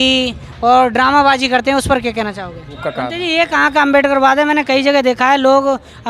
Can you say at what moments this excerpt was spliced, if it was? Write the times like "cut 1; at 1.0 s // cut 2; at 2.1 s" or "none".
cut 1; at 2.8 s